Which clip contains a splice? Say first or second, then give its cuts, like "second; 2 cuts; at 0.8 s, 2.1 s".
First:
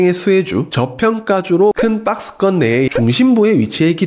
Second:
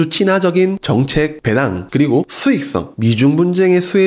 first; 1 cut; at 1.8 s